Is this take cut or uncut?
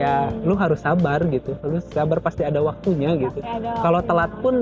uncut